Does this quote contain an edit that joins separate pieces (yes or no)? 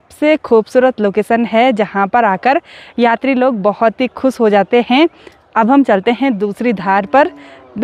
no